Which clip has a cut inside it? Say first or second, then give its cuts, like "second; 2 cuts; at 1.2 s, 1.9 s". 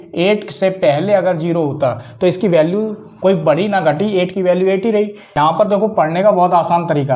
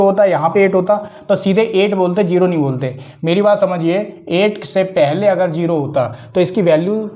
first; 1 cut; at 5.2 s